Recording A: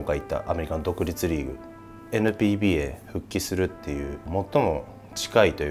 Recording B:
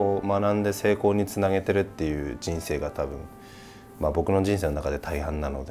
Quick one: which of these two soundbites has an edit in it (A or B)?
A